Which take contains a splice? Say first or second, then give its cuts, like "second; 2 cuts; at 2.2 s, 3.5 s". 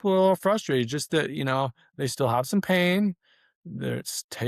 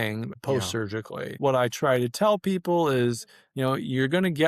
second; 1 cut; at 1.4 s